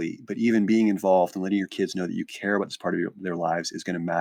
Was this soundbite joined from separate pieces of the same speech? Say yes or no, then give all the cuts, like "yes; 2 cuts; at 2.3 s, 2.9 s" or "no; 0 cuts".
no; 0 cuts